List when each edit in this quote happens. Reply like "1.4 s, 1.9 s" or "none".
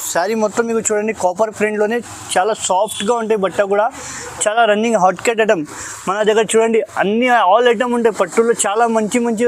none